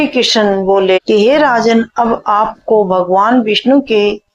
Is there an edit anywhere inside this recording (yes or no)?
yes